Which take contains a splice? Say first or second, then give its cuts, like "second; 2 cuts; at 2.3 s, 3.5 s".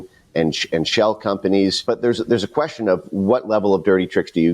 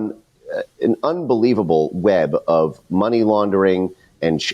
first; 1 cut; at 1.8 s